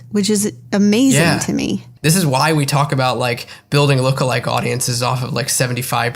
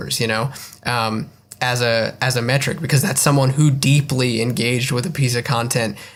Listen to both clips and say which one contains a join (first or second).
first